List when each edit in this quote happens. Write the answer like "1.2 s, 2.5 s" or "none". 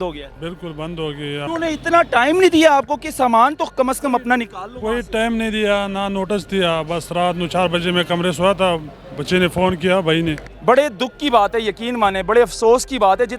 1.5 s, 10.5 s